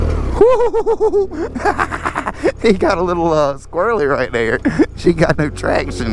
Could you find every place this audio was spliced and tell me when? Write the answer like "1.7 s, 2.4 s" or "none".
none